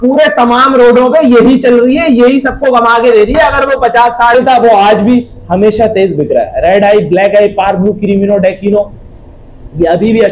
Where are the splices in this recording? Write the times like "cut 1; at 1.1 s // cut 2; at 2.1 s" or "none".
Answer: cut 1; at 4.3 s